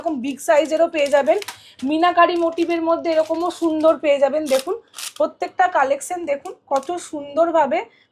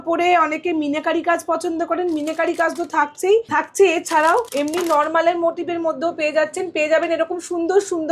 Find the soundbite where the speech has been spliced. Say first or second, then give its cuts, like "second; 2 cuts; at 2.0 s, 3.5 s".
second; 2 cuts; at 3.5 s, 4.5 s